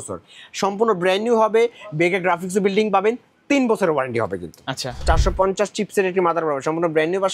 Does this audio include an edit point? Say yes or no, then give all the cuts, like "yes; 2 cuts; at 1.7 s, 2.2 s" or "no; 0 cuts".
yes; 1 cut; at 5.1 s